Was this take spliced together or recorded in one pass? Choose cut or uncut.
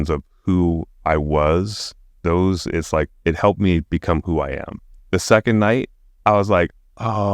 cut